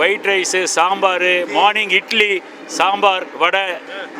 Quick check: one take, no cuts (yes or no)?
yes